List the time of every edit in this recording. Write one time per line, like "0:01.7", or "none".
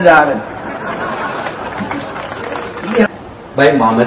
0:02.9